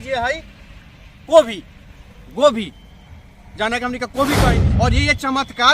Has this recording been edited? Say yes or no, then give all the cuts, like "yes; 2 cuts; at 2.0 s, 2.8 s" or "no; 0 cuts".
yes; 1 cut; at 4.5 s